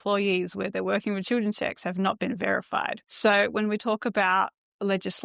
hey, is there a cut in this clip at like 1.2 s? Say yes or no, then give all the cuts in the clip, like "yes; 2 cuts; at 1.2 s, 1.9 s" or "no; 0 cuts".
no; 1 cut; at 3.0 s